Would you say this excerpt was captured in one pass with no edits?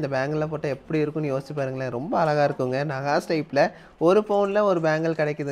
yes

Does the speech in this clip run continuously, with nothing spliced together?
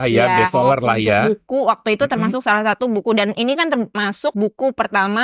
no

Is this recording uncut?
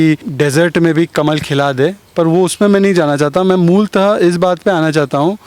yes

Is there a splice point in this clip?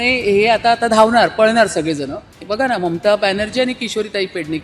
yes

